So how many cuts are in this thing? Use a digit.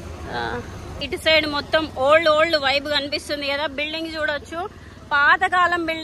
1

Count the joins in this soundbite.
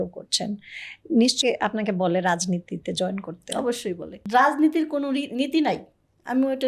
2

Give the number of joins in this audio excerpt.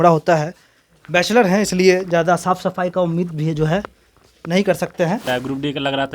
1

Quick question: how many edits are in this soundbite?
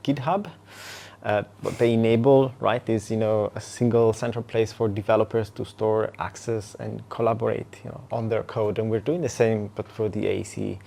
0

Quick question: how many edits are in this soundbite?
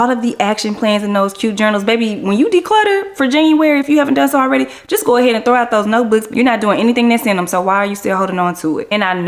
0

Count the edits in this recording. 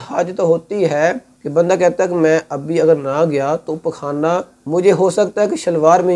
2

